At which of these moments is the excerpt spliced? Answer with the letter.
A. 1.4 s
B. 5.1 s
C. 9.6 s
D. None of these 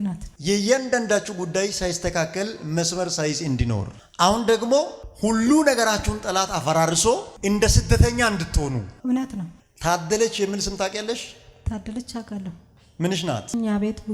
C